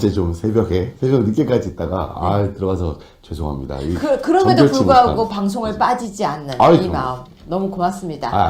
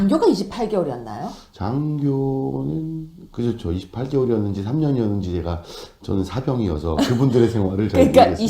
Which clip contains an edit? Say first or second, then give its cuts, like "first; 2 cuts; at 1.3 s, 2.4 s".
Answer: second; 1 cut; at 3.5 s